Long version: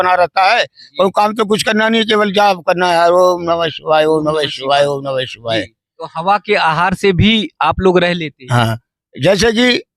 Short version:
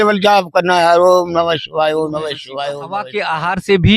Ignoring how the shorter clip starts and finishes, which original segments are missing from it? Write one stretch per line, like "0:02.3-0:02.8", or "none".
0:05.0-0:06.3